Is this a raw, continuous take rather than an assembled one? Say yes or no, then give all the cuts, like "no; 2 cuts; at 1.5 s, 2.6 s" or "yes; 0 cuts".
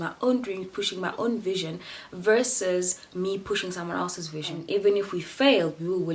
no; 1 cut; at 4.6 s